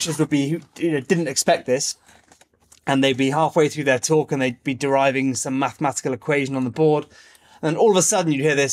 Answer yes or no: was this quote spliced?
no